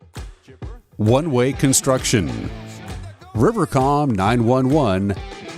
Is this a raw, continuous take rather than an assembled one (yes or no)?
no